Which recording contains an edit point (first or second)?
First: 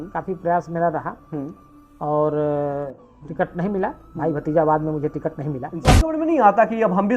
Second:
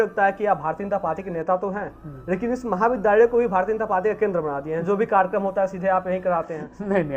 first